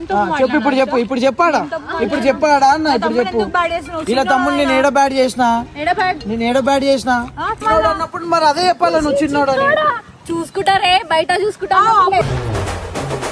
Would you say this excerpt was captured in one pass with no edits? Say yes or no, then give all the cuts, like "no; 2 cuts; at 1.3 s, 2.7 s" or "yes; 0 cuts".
no; 1 cut; at 7.5 s